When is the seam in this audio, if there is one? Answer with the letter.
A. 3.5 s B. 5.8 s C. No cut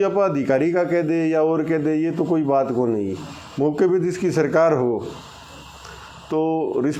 C